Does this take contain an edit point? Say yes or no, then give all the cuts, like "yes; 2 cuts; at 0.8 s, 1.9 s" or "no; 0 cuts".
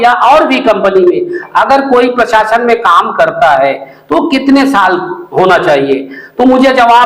no; 0 cuts